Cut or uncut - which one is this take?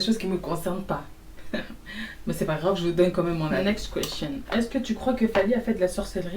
cut